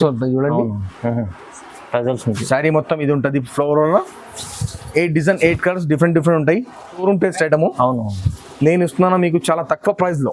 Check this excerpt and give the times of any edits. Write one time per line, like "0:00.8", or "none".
0:07.0